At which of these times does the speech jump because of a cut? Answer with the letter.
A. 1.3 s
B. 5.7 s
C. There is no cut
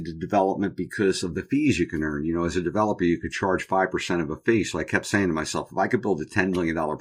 C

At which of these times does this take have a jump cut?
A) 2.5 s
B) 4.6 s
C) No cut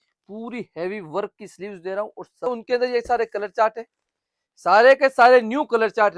A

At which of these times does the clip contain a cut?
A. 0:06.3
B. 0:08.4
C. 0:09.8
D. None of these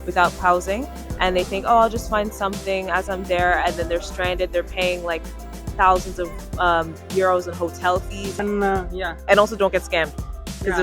B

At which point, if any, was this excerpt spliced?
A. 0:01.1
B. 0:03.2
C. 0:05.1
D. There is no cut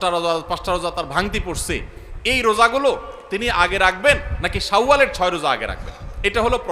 D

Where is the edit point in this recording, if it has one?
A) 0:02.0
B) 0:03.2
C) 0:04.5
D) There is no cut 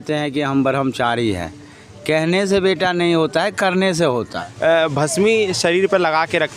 C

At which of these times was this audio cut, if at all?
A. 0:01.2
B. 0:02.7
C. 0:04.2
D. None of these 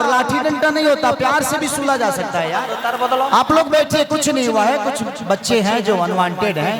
B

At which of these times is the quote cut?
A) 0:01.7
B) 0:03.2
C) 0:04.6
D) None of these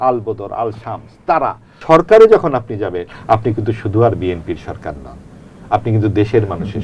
A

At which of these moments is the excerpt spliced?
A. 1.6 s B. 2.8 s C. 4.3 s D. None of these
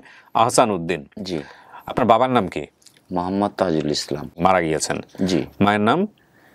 C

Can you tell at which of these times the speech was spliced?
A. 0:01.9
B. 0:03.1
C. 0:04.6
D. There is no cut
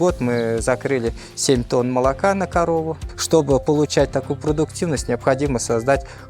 B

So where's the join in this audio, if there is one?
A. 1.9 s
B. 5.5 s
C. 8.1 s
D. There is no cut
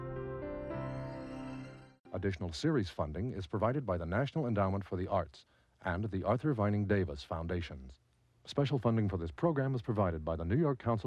A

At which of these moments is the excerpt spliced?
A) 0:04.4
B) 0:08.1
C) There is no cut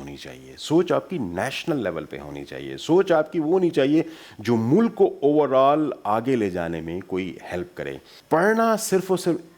B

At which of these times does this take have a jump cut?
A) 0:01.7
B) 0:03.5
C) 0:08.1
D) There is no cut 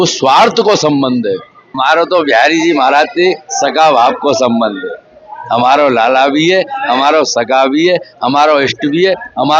A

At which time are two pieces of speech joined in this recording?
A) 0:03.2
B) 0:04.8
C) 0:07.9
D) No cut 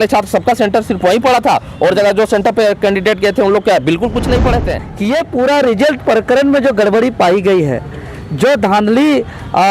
B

